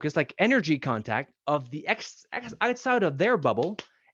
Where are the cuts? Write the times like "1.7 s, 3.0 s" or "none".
none